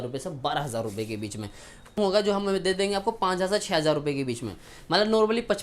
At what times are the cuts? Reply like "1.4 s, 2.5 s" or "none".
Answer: 2.0 s